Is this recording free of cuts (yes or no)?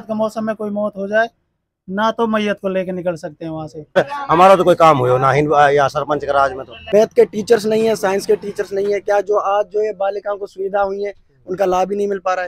no